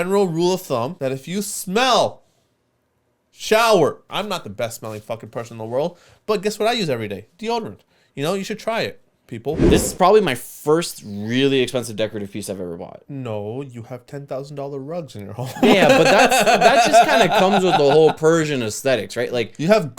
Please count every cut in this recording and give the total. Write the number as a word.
four